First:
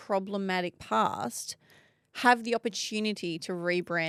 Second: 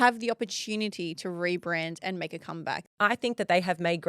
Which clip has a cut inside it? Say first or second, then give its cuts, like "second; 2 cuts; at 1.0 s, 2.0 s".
second; 1 cut; at 2.9 s